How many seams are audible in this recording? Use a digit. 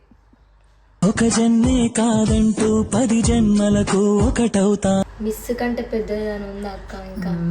1